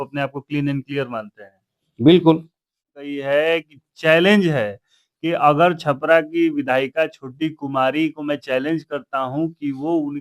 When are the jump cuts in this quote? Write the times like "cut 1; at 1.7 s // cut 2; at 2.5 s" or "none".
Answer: cut 1; at 3.1 s

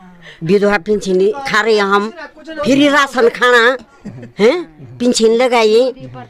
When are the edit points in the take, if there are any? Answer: cut 1; at 2.5 s

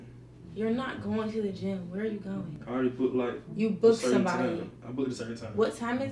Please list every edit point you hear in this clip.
cut 1; at 2.6 s // cut 2; at 3.4 s

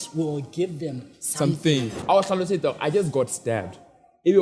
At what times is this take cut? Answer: cut 1; at 1.9 s

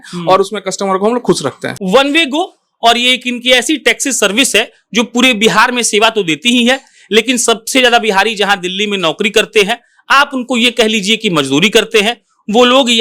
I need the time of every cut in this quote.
cut 1; at 1.7 s

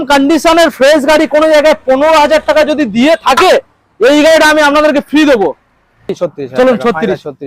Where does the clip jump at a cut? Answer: cut 1; at 6.1 s

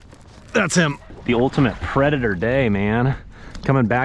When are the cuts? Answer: cut 1; at 1.1 s

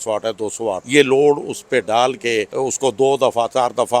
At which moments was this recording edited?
cut 1; at 0.8 s // cut 2; at 2.5 s

